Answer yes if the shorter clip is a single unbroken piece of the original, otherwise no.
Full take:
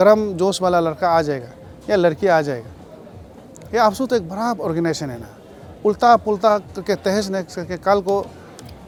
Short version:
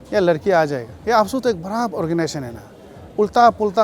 no